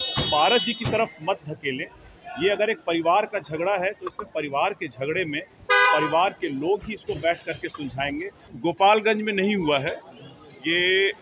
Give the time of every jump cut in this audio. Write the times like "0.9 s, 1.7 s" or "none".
8.5 s